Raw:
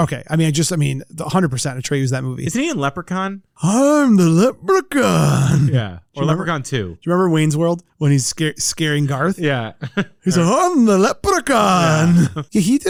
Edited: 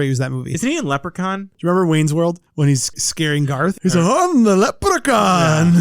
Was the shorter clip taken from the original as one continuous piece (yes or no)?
no